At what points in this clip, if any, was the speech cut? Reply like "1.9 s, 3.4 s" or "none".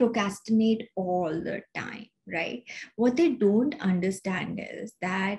none